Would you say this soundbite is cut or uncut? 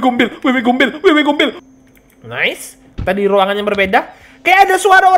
cut